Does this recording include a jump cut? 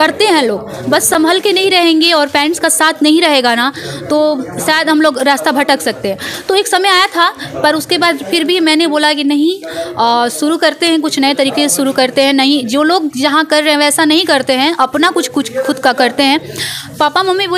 no; 0 cuts

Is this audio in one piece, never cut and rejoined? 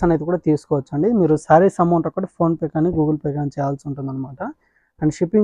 yes; 0 cuts

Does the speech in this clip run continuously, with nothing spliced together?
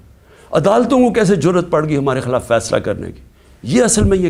yes; 0 cuts

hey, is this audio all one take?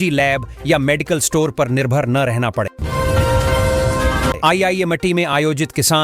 no; 2 cuts; at 2.8 s, 4.4 s

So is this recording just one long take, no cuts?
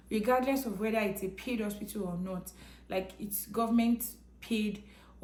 yes; 0 cuts

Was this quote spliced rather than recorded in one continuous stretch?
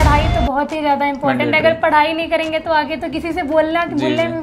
no; 0 cuts

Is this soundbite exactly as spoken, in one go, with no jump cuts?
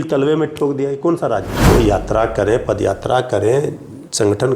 no; 1 cut; at 1.5 s

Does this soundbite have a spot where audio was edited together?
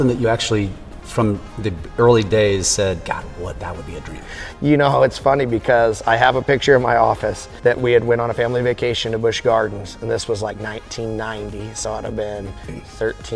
no; 0 cuts

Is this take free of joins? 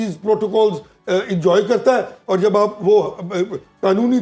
yes; 0 cuts

